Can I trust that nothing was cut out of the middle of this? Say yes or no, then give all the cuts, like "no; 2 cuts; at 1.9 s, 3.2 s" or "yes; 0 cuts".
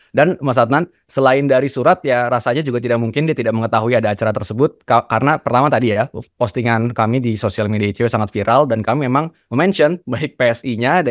yes; 0 cuts